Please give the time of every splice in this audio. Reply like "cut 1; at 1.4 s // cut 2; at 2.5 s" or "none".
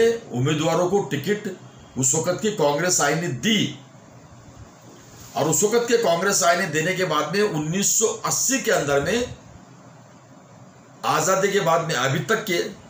none